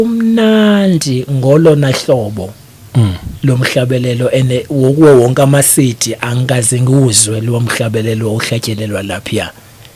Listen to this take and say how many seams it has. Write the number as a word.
zero